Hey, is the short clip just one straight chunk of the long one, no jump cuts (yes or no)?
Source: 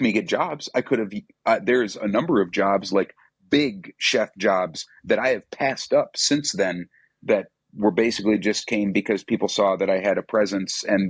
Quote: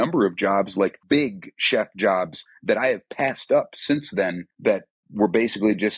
no